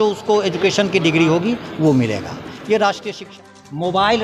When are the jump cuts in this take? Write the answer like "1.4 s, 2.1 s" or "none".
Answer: 3.3 s